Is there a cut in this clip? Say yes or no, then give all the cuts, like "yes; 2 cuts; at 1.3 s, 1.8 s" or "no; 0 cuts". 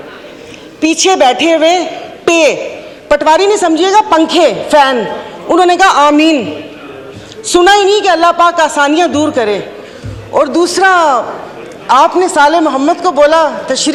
no; 0 cuts